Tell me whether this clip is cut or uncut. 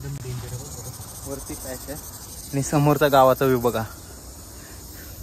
uncut